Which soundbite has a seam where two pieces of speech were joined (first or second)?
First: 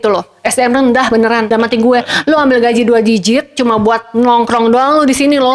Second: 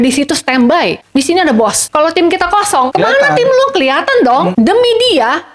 second